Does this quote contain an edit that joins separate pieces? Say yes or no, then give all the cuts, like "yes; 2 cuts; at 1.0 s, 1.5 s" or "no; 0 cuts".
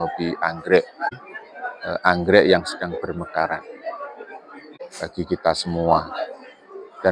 yes; 2 cuts; at 1.1 s, 4.7 s